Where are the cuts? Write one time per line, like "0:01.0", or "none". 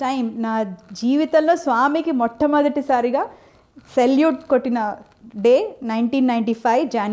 none